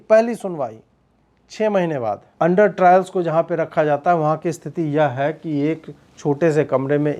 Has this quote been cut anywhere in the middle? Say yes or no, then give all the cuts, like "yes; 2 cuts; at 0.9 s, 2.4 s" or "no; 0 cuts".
yes; 1 cut; at 2.2 s